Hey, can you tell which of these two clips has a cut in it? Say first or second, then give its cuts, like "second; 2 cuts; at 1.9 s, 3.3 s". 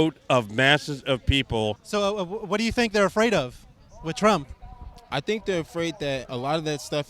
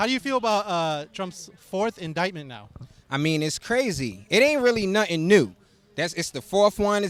first; 1 cut; at 1.8 s